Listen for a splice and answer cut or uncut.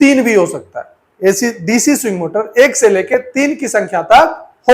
uncut